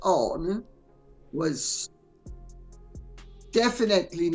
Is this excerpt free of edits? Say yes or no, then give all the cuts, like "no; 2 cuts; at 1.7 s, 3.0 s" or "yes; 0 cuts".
no; 2 cuts; at 2.1 s, 3.5 s